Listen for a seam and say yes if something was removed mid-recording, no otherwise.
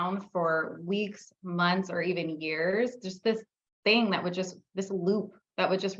no